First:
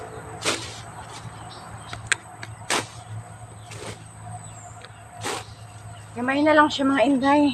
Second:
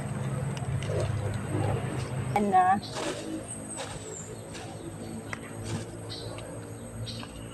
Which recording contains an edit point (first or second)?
second